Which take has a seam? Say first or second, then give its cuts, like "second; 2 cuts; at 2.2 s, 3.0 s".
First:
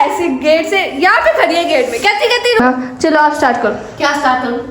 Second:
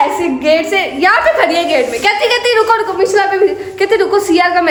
first; 1 cut; at 2.6 s